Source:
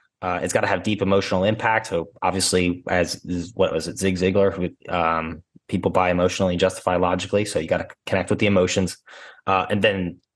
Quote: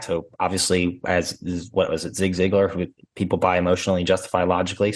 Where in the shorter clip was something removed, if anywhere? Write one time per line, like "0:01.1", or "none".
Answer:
0:03.0